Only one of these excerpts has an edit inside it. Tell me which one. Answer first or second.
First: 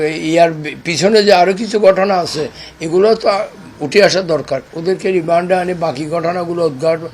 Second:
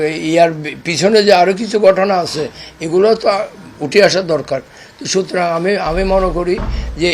first